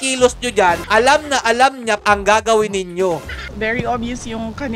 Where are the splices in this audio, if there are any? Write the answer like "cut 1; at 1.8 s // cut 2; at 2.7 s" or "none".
cut 1; at 0.8 s // cut 2; at 2.0 s // cut 3; at 3.4 s